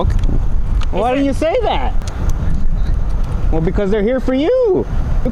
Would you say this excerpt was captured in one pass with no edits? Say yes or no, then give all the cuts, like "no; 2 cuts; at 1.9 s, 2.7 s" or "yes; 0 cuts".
yes; 0 cuts